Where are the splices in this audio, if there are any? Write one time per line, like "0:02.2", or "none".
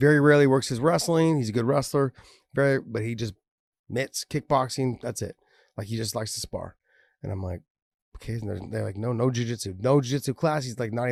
none